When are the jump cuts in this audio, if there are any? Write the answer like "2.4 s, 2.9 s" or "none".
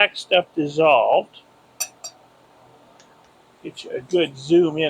3.3 s